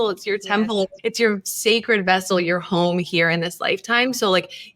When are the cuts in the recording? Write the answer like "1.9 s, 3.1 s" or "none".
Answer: 0.9 s